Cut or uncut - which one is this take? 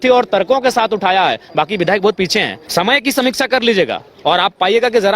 cut